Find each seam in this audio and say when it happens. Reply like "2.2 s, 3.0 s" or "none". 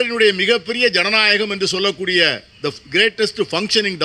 none